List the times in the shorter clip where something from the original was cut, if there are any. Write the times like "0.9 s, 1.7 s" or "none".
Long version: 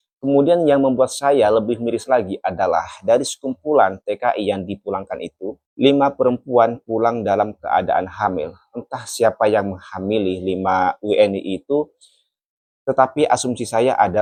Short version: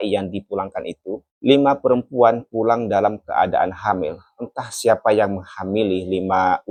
none